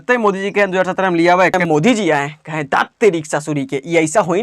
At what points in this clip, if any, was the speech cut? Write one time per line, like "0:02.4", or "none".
0:01.6